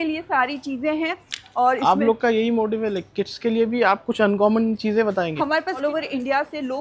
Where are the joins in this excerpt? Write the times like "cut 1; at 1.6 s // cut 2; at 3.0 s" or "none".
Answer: cut 1; at 5.8 s